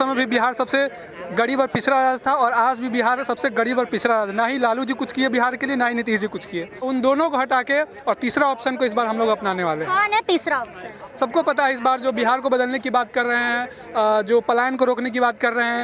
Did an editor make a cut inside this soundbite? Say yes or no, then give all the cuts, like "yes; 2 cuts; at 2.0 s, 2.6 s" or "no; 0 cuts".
no; 0 cuts